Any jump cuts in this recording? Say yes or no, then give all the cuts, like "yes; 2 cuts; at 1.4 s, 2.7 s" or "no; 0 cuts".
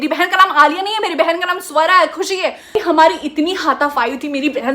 yes; 1 cut; at 2.7 s